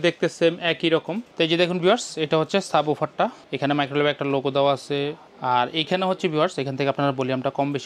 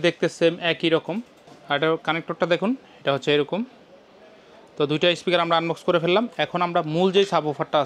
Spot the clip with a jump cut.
first; 3 cuts; at 1.3 s, 3.4 s, 5.3 s

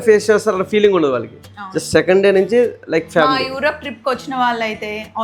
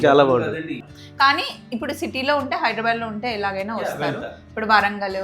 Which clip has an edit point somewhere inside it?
second; 1 cut; at 0.9 s

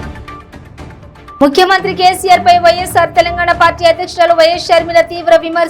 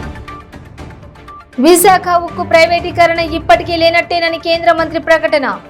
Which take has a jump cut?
first; 1 cut; at 1.3 s

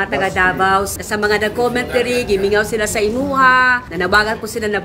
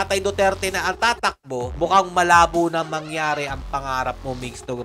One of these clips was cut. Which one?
first; 2 cuts; at 0.9 s, 3.9 s

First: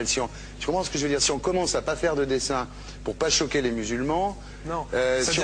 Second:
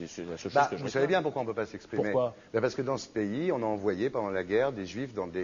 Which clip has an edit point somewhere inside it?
second; 1 cut; at 2.1 s

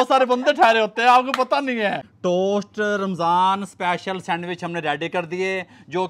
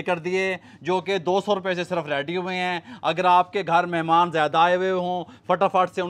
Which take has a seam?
first; 1 cut; at 2.1 s

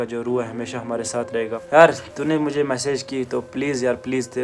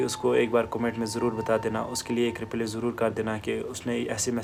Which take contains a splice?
first; 1 cut; at 1.7 s

